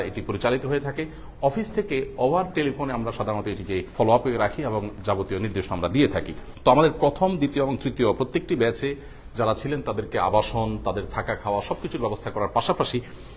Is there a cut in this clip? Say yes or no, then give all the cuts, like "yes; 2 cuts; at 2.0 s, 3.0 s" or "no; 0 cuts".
no; 0 cuts